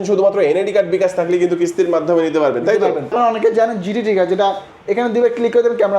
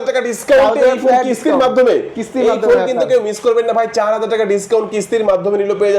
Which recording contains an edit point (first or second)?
first